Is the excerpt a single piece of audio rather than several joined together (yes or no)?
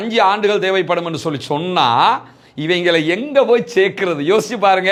yes